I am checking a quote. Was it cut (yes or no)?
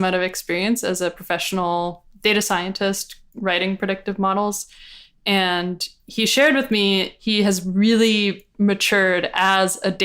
yes